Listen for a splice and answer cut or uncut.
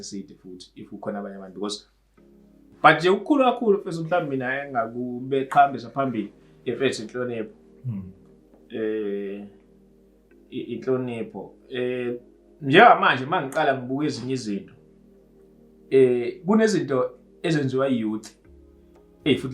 uncut